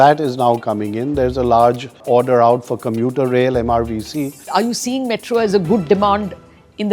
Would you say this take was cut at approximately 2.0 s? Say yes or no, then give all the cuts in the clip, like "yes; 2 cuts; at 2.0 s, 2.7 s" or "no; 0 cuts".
yes; 2 cuts; at 2.0 s, 4.5 s